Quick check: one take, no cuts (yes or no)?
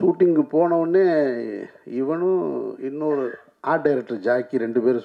yes